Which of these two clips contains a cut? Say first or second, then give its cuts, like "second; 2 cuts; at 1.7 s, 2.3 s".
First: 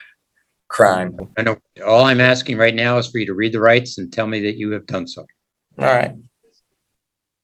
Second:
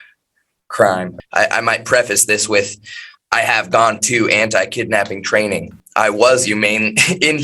second; 2 cuts; at 1.2 s, 5.8 s